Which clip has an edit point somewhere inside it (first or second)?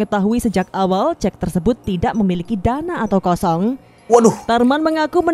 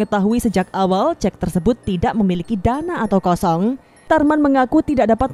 second